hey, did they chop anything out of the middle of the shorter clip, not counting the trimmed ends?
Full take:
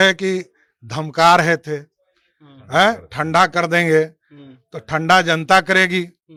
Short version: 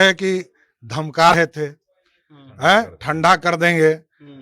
yes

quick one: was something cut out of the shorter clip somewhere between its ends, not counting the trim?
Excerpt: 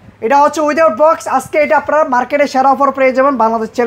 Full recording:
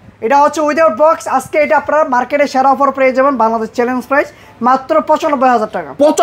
no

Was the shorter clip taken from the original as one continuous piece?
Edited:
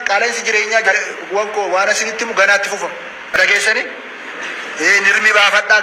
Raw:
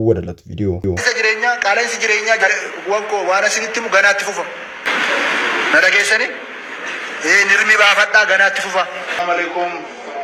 no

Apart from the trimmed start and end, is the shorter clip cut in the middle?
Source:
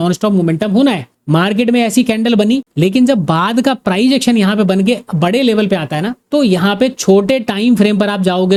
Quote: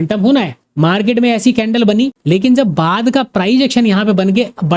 no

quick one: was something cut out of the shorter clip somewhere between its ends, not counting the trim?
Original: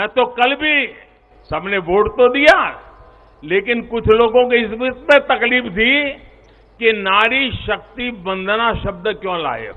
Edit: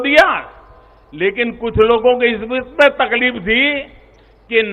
no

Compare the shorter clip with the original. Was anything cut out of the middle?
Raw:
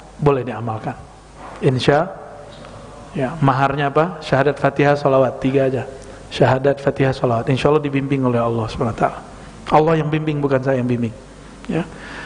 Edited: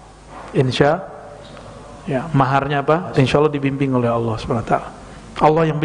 yes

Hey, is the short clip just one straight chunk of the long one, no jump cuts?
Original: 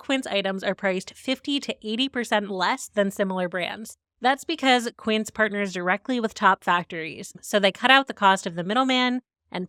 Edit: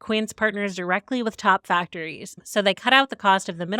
yes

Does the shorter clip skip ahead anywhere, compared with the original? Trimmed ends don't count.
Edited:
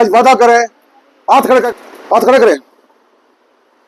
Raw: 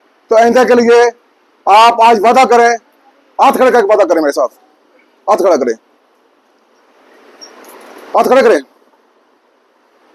yes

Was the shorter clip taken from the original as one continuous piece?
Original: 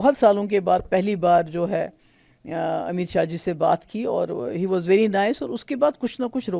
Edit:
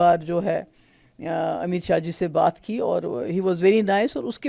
yes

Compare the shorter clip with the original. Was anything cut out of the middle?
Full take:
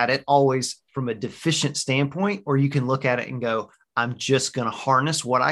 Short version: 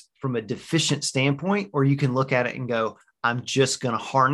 no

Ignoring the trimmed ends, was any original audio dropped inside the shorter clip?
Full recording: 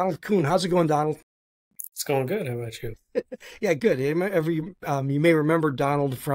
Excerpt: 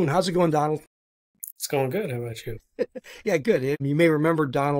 yes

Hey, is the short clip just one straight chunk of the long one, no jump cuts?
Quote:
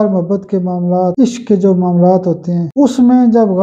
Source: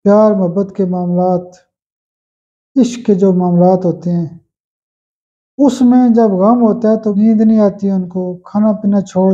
no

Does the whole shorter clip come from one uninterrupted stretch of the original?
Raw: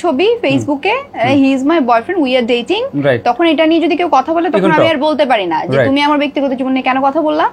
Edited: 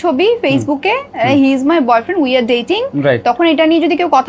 yes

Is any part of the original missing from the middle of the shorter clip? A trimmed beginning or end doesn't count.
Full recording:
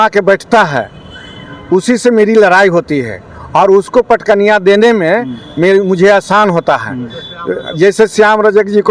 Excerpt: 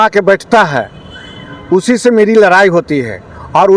no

